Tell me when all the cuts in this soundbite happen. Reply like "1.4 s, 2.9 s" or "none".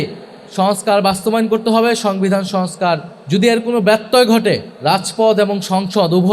3.1 s, 4.7 s